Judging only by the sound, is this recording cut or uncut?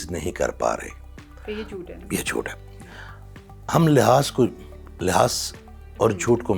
uncut